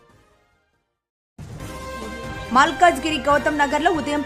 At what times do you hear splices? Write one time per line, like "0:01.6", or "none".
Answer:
0:02.2